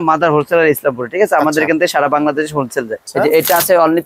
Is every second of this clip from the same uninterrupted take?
no; 1 cut; at 3.0 s

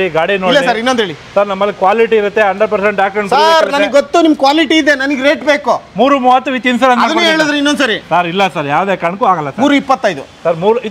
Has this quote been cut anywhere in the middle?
no; 0 cuts

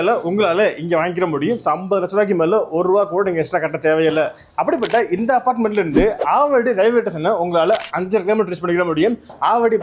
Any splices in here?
no; 0 cuts

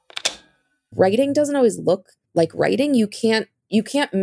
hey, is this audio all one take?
no; 1 cut; at 0.9 s

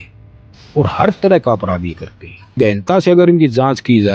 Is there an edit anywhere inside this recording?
yes; 1 cut; at 2.6 s

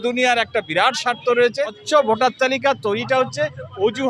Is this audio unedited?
no; 1 cut; at 1.8 s

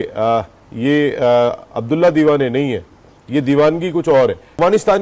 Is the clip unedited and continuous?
no; 1 cut; at 4.1 s

